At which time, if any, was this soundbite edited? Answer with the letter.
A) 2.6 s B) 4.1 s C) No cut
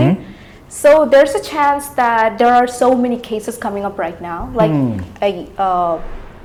C